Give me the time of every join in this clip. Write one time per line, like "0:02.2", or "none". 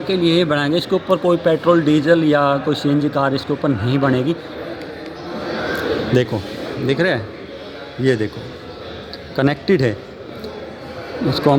0:04.5